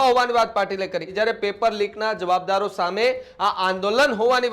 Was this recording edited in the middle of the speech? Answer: yes; 1 cut; at 1.1 s

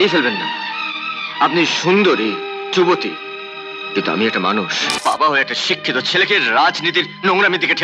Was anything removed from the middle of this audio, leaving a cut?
yes; 1 cut; at 5.0 s

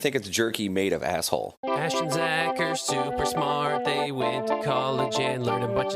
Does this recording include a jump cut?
yes; 1 cut; at 1.4 s

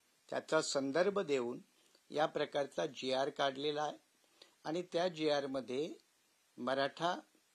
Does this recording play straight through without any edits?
yes; 0 cuts

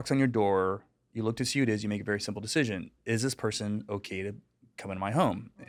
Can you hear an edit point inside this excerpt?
no; 0 cuts

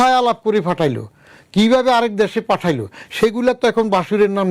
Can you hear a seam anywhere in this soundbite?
no; 0 cuts

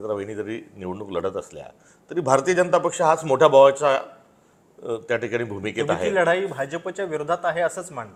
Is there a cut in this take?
no; 0 cuts

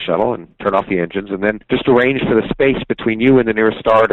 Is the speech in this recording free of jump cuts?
no; 1 cut; at 1.6 s

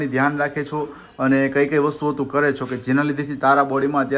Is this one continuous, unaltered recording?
yes; 0 cuts

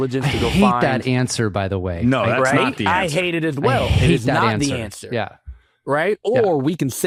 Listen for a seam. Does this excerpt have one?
no; 0 cuts

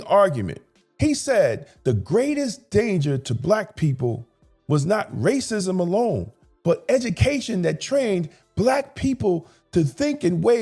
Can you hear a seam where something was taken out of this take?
no; 0 cuts

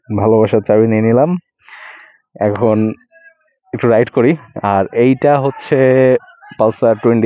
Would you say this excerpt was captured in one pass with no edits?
yes; 0 cuts

